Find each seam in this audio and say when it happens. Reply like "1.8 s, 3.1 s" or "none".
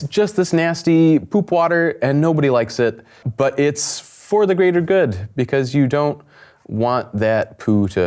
none

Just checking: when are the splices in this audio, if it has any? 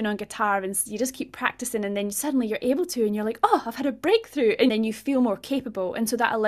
4.7 s

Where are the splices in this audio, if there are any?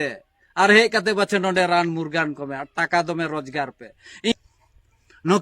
4.3 s

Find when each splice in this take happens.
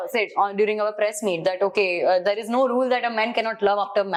none

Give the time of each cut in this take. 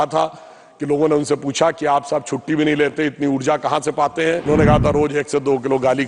4.5 s

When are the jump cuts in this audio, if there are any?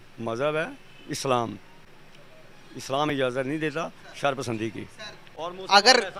none

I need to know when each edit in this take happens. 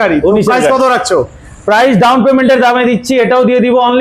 none

